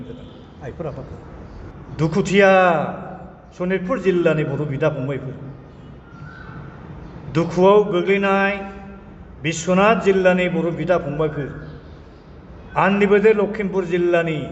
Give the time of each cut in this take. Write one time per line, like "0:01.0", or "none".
0:01.7